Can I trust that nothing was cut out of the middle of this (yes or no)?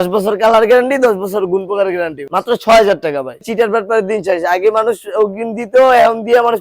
no